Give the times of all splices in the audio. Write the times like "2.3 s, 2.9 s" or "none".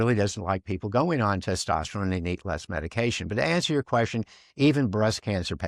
none